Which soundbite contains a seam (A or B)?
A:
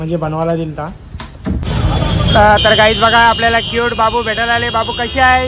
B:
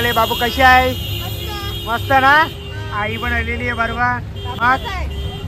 A